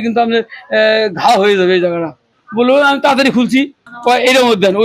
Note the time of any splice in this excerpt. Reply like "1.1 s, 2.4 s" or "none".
2.4 s, 3.9 s